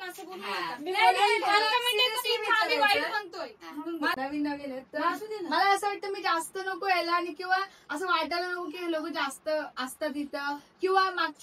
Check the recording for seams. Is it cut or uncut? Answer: cut